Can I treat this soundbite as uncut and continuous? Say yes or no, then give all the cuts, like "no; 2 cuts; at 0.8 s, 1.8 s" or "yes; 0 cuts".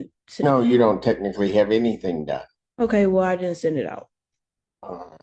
yes; 0 cuts